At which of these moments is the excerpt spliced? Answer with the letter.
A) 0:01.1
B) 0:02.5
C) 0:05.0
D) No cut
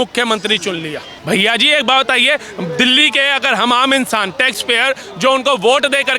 A